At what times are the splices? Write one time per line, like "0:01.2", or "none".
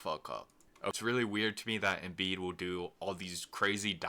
0:01.0